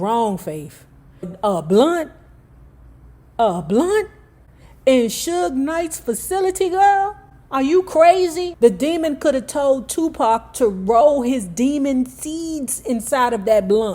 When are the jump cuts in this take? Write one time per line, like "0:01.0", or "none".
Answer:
0:01.3
0:08.5